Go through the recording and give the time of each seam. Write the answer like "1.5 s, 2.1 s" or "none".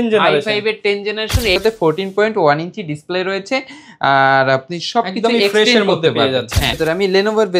1.6 s, 6.8 s